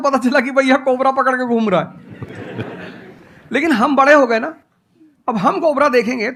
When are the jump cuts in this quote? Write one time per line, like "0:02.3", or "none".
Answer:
none